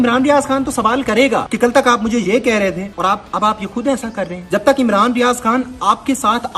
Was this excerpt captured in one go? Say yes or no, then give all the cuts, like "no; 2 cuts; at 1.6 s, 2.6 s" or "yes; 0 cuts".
no; 3 cuts; at 1.5 s, 2.9 s, 4.4 s